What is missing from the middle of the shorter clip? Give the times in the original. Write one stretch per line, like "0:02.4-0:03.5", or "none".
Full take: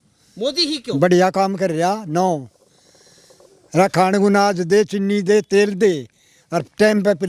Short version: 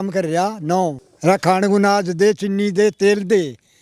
0:02.5-0:03.6